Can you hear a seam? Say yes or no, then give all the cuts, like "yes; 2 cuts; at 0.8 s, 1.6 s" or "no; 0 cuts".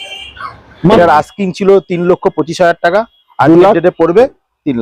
yes; 1 cut; at 0.9 s